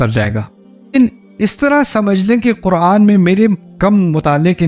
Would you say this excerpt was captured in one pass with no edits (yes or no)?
no